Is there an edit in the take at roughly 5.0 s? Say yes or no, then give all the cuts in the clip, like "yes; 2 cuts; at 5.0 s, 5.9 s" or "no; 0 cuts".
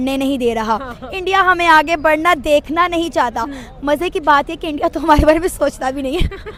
no; 0 cuts